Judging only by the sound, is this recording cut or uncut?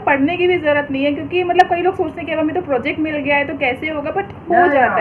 uncut